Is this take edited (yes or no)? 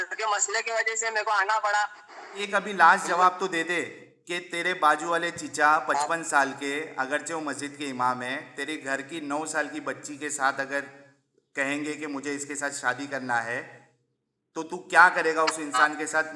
yes